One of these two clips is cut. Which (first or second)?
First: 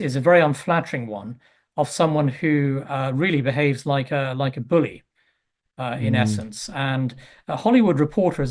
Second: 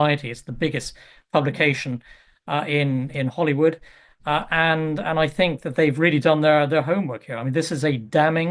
first